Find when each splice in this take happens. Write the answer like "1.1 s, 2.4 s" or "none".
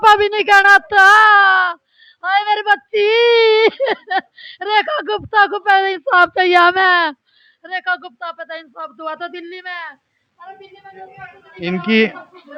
none